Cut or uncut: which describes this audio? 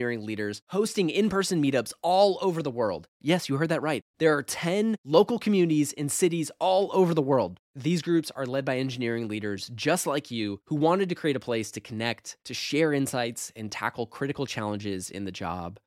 uncut